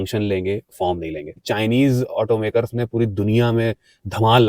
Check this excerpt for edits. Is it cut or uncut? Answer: cut